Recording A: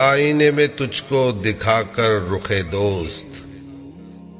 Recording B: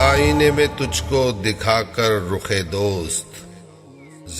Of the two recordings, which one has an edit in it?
A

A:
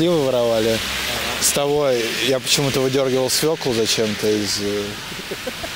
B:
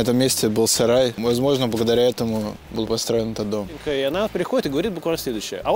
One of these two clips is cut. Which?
B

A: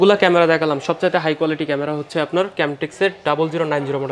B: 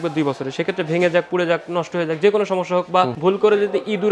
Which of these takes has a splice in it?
B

